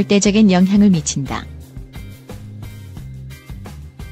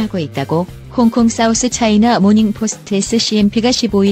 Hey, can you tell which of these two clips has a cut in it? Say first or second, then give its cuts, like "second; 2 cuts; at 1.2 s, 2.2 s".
first; 1 cut; at 1.5 s